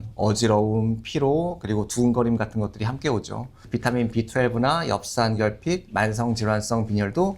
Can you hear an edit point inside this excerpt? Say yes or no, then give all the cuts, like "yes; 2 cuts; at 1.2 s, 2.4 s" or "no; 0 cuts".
yes; 1 cut; at 3.5 s